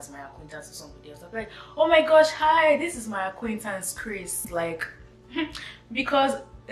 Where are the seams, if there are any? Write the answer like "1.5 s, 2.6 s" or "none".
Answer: none